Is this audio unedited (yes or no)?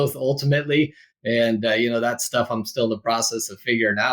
yes